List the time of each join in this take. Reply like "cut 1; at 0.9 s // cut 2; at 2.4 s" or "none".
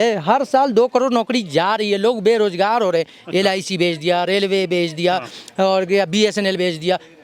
none